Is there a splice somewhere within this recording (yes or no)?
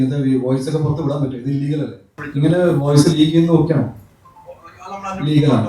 yes